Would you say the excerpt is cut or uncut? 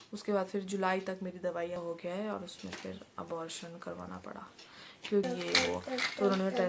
cut